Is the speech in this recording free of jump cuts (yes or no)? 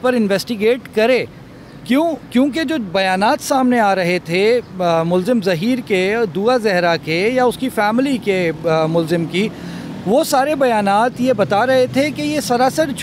yes